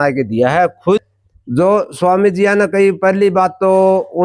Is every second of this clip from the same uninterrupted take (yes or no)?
no